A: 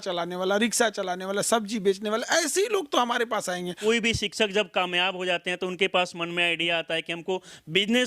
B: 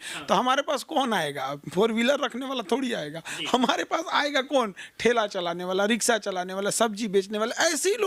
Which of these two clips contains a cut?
A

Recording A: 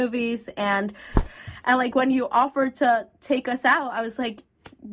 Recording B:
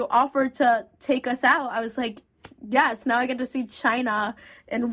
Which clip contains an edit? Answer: A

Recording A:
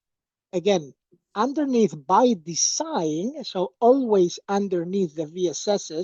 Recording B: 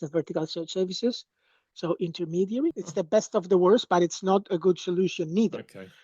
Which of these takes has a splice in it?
B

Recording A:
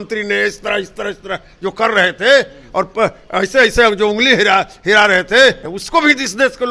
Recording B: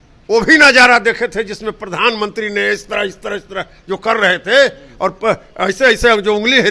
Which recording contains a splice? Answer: A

